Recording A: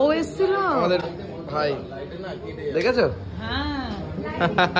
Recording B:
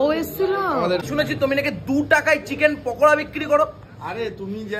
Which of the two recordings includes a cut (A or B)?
B